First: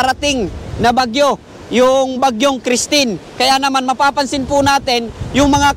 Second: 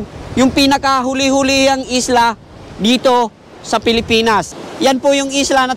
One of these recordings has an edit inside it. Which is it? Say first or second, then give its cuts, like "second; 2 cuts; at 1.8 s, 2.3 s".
second; 1 cut; at 4.6 s